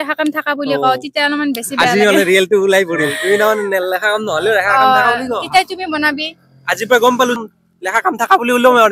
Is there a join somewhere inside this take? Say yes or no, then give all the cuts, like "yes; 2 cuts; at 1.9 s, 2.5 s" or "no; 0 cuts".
yes; 1 cut; at 7.4 s